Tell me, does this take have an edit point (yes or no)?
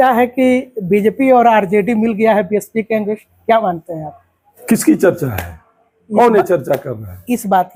no